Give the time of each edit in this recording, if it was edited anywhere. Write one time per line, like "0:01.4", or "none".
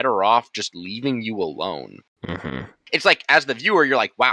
0:02.6